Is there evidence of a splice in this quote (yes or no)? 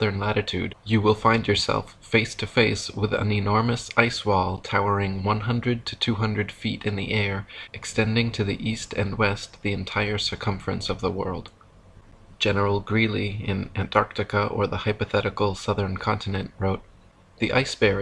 yes